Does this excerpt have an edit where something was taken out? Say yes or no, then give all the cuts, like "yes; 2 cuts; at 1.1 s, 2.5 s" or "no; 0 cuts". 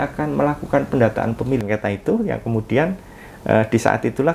yes; 1 cut; at 1.6 s